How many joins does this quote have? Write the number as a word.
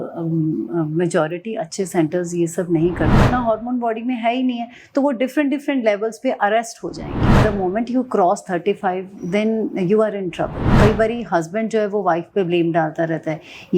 three